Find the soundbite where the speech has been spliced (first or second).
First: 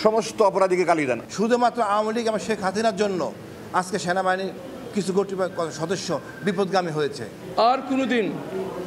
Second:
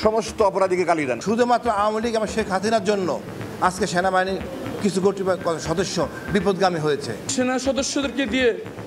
second